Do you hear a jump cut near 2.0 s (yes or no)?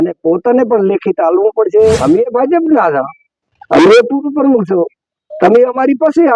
yes